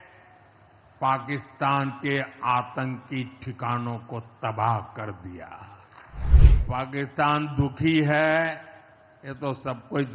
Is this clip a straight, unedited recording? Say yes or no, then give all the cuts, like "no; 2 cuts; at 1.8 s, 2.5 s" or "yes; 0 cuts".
no; 1 cut; at 6.3 s